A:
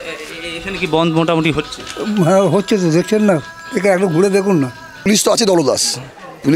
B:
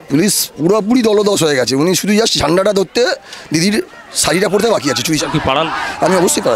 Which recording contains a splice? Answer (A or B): A